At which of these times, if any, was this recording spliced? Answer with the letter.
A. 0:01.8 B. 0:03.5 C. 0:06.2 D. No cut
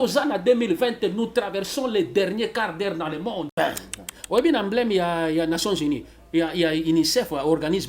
B